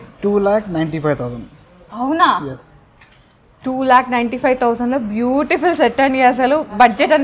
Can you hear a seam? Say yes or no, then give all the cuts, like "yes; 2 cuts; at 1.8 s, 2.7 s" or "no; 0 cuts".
no; 0 cuts